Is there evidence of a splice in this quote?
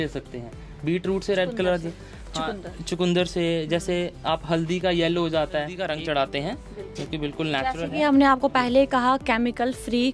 yes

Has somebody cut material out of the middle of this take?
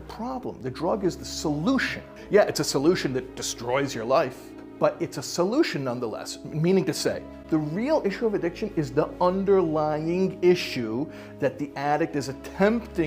yes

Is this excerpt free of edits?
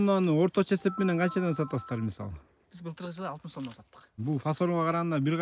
no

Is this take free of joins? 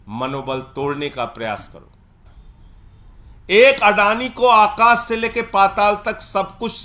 no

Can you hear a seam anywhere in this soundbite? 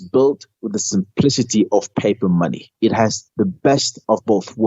yes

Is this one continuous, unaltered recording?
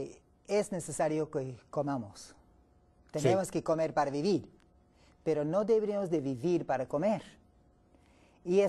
no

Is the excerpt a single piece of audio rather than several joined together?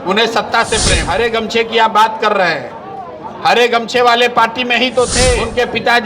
no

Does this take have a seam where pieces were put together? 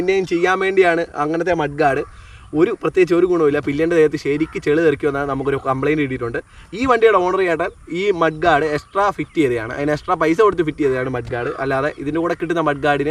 no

